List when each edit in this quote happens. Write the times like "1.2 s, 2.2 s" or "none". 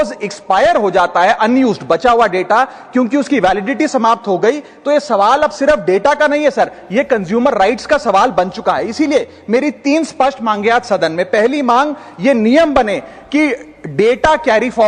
none